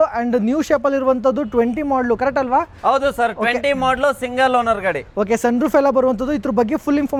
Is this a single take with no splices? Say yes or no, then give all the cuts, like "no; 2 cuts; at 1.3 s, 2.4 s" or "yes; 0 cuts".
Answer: yes; 0 cuts